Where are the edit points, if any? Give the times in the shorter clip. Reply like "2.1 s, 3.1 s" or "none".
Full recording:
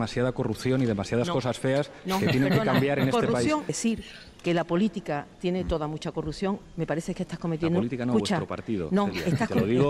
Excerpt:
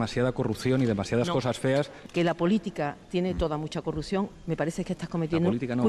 2.0 s